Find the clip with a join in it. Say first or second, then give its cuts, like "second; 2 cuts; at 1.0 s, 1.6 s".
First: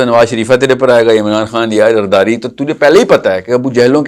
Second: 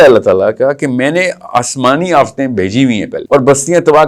second; 1 cut; at 3.1 s